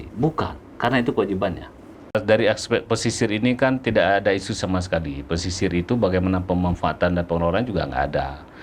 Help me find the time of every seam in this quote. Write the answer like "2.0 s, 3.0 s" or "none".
2.1 s